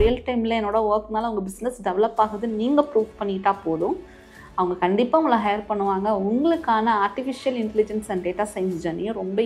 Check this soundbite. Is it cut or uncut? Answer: uncut